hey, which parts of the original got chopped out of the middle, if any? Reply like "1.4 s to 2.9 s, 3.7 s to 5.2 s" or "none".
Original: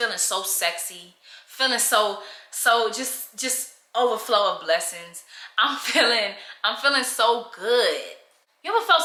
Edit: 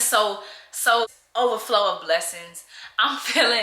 2.9 s to 3.7 s